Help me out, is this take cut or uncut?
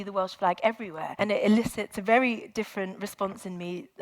cut